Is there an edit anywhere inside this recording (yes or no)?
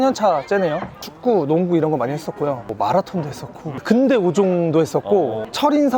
yes